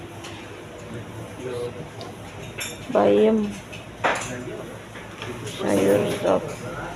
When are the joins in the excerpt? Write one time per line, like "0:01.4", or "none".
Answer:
none